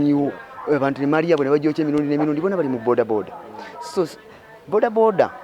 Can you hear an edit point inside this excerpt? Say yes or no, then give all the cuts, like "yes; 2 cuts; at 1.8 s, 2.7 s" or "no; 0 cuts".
no; 0 cuts